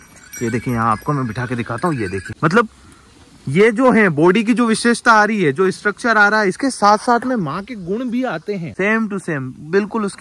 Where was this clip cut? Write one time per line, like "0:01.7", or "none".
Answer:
0:02.2
0:08.7